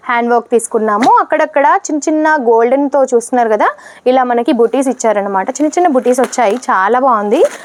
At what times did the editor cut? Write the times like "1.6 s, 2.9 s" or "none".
none